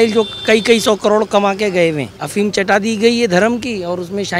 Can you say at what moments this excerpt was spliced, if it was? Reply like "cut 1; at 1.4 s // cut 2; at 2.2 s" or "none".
cut 1; at 2.1 s